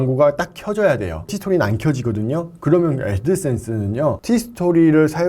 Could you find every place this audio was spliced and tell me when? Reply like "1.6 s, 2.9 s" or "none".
1.4 s, 4.2 s